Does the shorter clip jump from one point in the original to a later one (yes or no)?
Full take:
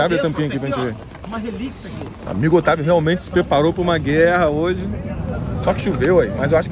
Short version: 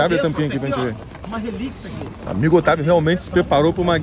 no